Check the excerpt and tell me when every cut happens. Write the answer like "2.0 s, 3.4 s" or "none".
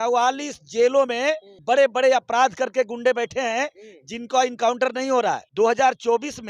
1.6 s, 5.4 s